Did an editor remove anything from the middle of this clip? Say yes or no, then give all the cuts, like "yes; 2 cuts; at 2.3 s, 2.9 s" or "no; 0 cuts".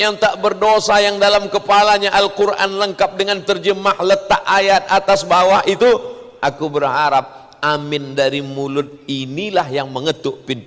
no; 0 cuts